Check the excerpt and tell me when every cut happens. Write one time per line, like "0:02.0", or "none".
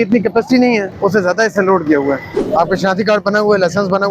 0:00.9
0:02.3

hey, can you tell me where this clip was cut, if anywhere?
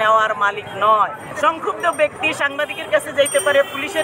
0:01.3

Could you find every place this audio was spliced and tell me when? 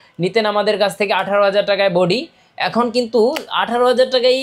none

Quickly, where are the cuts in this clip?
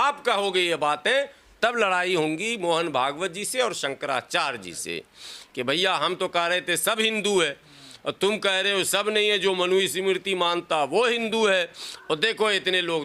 none

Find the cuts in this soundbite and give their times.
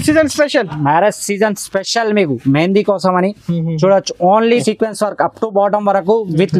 0:04.5

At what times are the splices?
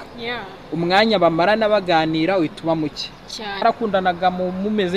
0:03.6

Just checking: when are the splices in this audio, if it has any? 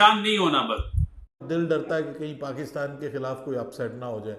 0:01.3

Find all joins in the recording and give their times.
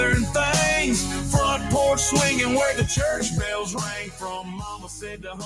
none

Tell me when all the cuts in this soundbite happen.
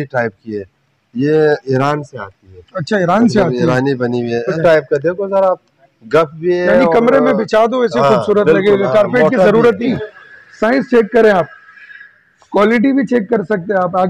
0:04.5
0:09.9

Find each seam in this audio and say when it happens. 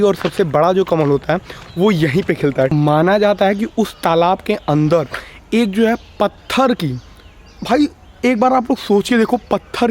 0:02.7

